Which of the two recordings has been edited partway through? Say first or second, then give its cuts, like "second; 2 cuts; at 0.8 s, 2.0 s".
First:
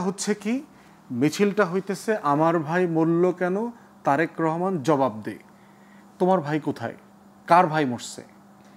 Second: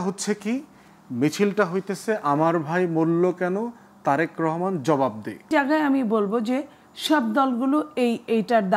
second; 1 cut; at 5.5 s